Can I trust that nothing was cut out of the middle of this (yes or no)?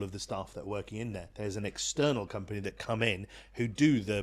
no